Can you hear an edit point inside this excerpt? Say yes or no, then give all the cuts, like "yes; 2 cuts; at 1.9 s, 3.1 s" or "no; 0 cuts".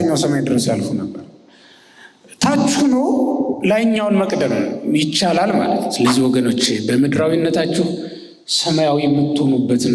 yes; 1 cut; at 5.9 s